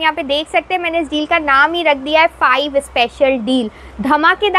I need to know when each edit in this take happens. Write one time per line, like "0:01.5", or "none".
none